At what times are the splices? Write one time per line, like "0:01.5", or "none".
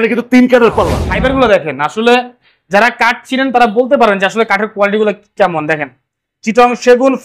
0:01.0